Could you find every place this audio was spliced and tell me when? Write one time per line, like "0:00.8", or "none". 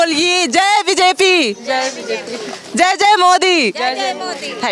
none